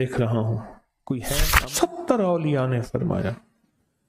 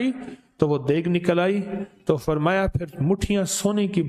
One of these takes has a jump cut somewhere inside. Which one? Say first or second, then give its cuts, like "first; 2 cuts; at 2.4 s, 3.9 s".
first; 1 cut; at 1.5 s